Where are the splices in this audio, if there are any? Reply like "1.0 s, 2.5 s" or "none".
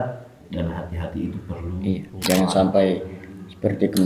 2.1 s